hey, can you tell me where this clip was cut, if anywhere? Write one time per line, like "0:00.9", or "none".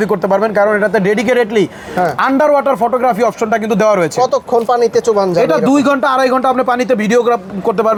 none